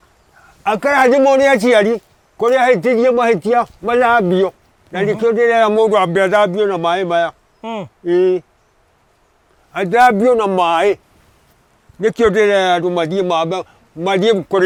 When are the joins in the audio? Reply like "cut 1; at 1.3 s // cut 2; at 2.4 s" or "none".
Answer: none